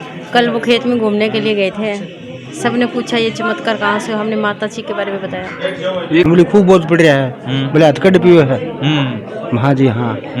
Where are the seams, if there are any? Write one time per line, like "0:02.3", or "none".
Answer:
0:06.2